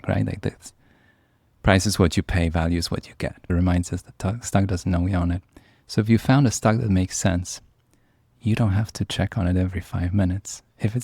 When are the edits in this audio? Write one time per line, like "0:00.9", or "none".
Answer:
0:03.5